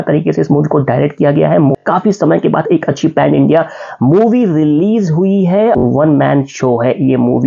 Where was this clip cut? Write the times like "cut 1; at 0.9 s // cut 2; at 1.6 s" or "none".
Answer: cut 1; at 1.8 s // cut 2; at 5.8 s